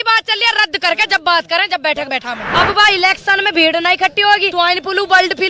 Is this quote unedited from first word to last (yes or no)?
no